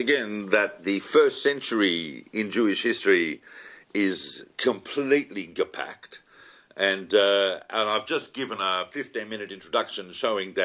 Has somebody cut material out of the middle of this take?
no; 0 cuts

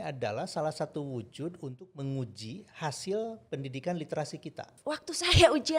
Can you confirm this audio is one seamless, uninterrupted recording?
no; 1 cut; at 4.7 s

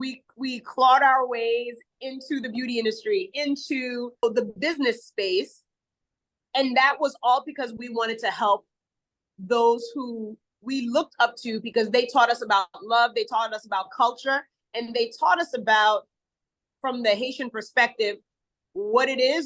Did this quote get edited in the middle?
yes; 1 cut; at 4.2 s

